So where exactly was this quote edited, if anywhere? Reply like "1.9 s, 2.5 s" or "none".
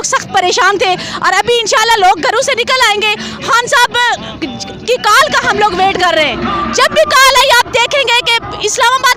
none

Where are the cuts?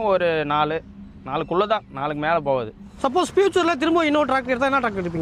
2.9 s

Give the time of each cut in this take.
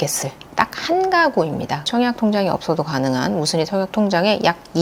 1.9 s

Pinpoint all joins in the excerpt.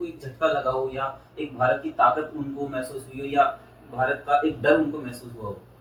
none

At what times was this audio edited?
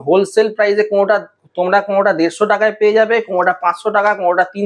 none

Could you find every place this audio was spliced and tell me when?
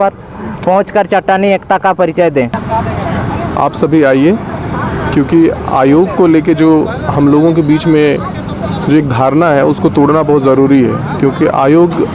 none

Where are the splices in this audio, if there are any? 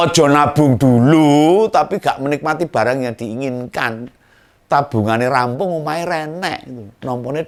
none

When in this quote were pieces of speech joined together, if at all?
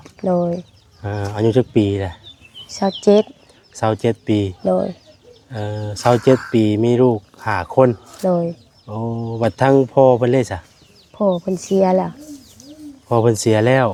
none

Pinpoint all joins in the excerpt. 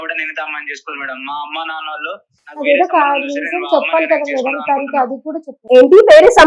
none

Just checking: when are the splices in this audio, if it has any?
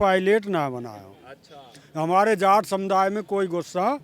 none

